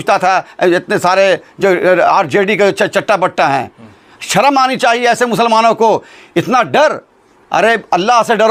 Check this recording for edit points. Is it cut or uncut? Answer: uncut